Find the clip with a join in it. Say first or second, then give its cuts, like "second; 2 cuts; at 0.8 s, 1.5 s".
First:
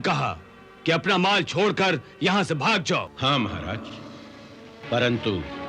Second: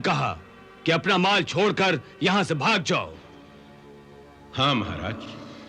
first; 2 cuts; at 3.1 s, 4.8 s